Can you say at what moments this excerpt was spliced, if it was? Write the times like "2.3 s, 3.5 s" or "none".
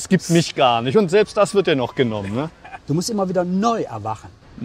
2.7 s

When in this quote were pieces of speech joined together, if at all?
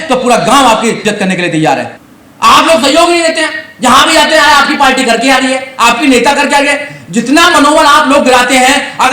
1.9 s

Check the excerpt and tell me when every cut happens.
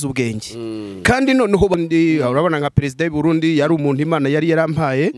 1.7 s

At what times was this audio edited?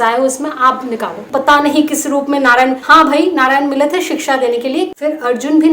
1.3 s, 2.8 s, 4.9 s

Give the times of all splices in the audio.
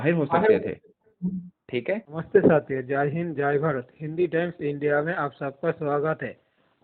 none

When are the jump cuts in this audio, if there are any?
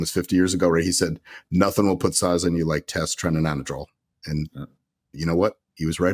none

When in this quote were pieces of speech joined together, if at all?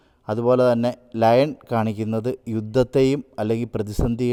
none

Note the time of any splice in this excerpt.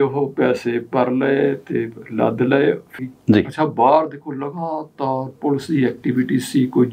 2.9 s

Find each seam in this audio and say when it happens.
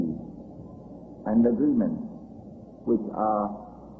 1.7 s

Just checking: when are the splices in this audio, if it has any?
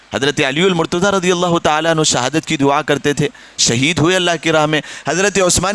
none

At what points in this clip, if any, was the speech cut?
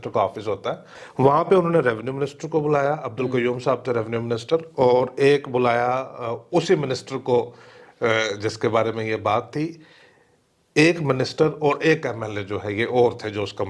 0.9 s

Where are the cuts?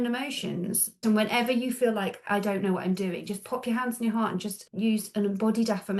1.0 s, 2.2 s, 4.6 s

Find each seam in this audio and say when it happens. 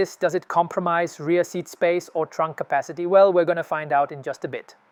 none

